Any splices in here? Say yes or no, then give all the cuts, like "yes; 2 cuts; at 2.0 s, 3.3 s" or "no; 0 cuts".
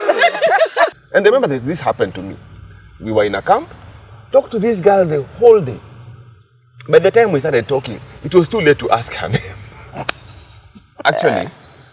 yes; 2 cuts; at 0.9 s, 11.0 s